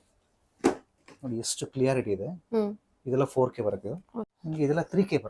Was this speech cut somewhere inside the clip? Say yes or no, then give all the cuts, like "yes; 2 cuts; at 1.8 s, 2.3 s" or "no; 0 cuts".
yes; 1 cut; at 4.3 s